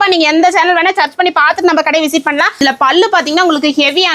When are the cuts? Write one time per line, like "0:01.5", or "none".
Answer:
0:02.6